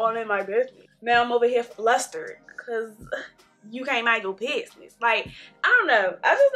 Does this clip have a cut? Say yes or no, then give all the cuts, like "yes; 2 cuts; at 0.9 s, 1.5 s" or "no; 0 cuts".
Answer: no; 0 cuts